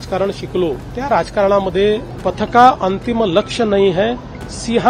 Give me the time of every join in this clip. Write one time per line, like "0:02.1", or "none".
0:00.9
0:02.1